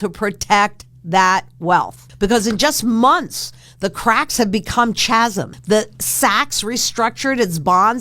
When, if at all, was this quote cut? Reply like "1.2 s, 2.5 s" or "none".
2.0 s, 5.6 s